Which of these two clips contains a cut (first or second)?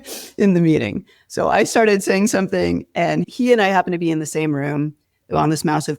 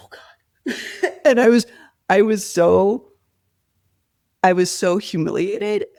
first